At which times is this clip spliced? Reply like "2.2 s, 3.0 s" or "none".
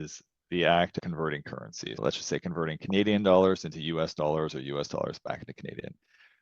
0.9 s